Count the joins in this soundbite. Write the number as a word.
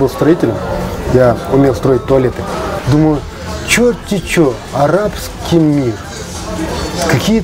one